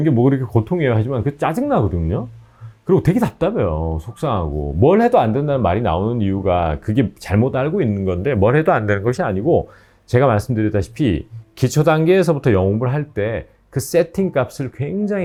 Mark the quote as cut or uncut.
uncut